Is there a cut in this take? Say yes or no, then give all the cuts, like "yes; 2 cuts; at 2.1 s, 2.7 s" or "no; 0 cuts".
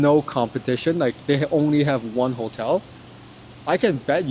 no; 0 cuts